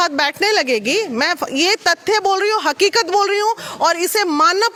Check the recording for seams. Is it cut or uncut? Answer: uncut